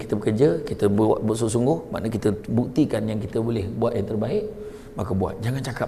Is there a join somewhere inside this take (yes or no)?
no